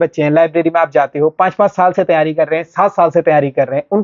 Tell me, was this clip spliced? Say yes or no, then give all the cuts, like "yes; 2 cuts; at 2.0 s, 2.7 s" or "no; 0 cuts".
no; 0 cuts